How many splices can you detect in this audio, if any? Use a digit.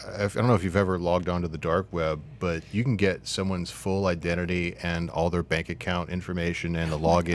0